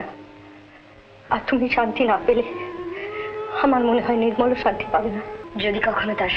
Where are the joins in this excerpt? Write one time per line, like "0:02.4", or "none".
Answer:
0:05.4